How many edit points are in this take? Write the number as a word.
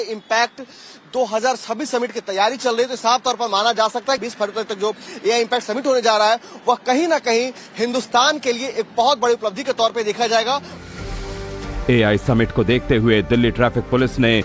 one